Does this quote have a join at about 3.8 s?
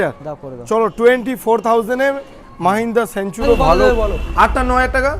yes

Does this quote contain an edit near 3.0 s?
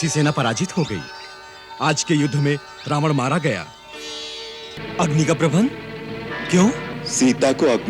no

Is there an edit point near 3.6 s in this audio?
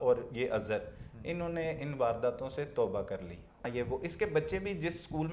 yes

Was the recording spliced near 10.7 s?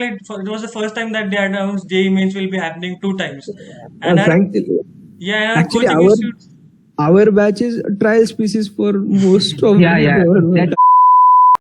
yes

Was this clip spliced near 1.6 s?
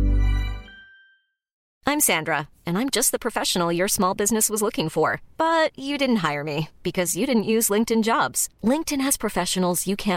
yes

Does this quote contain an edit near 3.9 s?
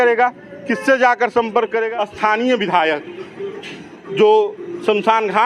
no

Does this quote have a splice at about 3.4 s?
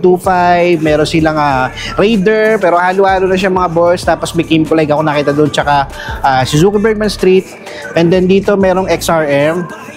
no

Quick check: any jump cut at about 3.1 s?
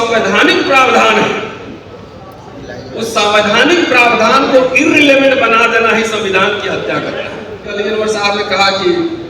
no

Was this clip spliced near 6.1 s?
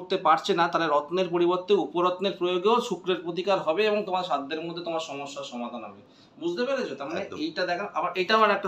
no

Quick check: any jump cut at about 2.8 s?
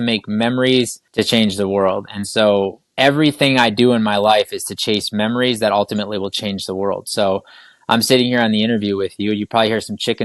yes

